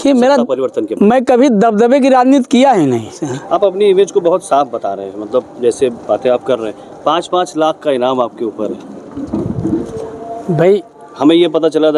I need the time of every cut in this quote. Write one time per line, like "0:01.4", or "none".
0:03.3
0:11.0